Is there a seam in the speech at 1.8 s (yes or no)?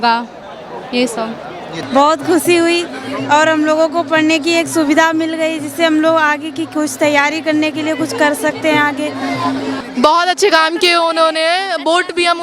yes